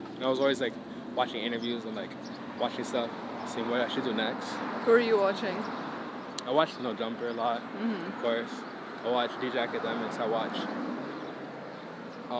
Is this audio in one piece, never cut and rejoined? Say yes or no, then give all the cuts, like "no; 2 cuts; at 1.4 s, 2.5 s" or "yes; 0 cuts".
yes; 0 cuts